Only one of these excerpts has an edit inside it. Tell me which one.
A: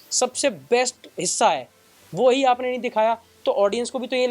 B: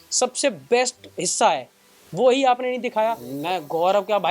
B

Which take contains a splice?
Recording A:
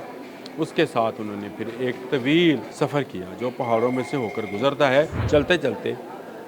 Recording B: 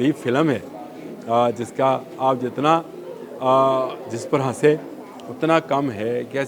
A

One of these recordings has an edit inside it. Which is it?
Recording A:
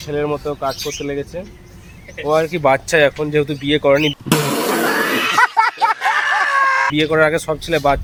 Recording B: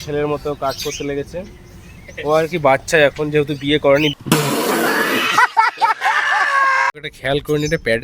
B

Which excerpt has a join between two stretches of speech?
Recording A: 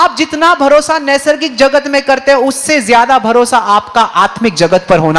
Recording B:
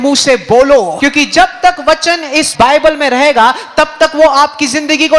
B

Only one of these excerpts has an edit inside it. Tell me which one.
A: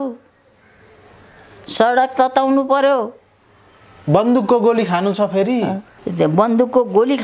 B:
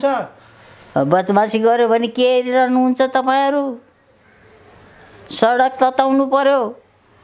A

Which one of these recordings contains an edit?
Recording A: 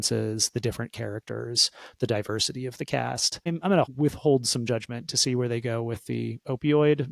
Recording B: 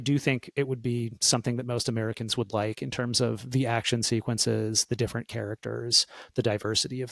A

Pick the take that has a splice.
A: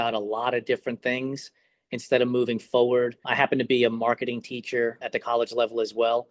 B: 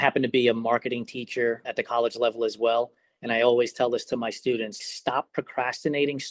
B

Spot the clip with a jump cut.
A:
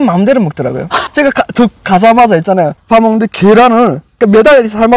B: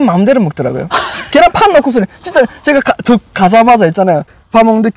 A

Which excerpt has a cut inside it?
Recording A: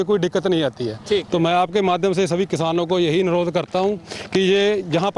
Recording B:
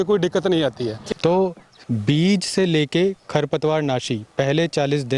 B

